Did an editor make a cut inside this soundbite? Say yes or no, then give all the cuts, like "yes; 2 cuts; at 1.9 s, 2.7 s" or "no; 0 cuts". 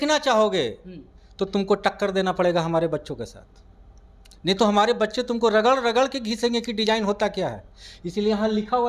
no; 0 cuts